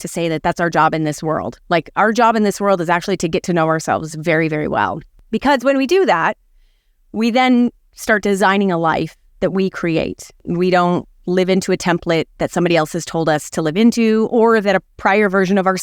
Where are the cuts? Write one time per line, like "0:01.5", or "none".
0:05.3
0:10.4